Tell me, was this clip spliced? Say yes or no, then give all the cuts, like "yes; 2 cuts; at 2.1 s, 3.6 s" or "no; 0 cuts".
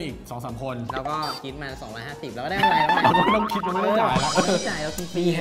no; 0 cuts